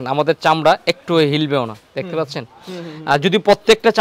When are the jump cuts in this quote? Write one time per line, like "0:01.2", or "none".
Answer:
none